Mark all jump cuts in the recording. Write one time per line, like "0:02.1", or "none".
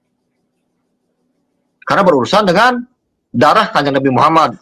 none